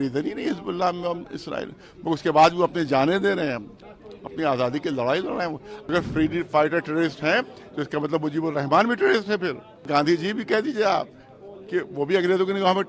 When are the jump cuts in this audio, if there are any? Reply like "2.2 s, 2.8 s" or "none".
5.9 s, 9.9 s